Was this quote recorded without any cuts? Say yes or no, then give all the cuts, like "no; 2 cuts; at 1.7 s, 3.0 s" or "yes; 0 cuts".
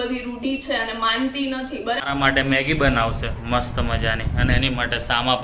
no; 1 cut; at 2.0 s